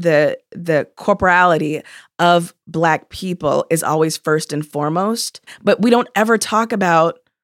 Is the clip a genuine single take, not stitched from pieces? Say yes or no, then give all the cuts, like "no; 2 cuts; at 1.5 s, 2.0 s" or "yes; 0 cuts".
no; 1 cut; at 5.5 s